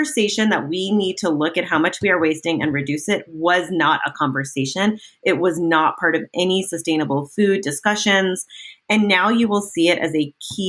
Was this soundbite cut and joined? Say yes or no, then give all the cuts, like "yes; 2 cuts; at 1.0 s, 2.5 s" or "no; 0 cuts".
no; 0 cuts